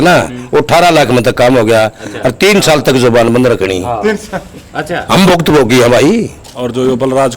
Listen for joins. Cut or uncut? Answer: cut